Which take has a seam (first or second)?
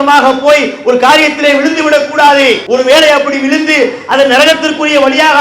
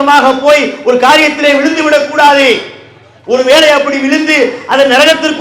first